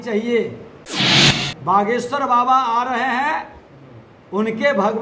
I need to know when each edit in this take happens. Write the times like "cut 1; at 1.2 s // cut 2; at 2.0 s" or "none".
cut 1; at 1.2 s